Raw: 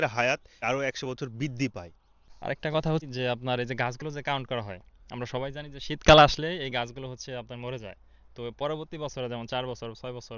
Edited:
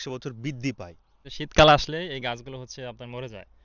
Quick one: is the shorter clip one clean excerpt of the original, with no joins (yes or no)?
no